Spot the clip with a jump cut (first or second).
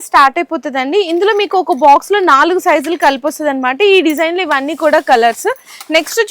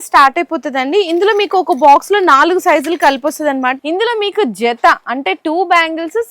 second